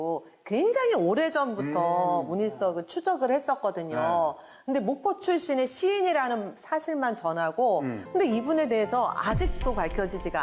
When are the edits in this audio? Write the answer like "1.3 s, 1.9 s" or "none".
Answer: 8.0 s